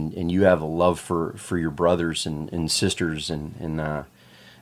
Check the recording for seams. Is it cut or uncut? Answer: uncut